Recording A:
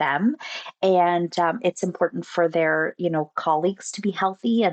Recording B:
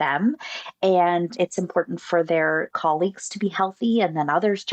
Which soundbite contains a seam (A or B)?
B